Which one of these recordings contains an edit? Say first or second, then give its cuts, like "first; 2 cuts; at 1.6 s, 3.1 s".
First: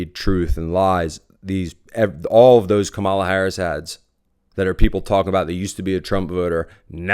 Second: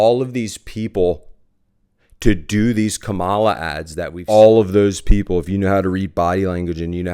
second; 1 cut; at 4.2 s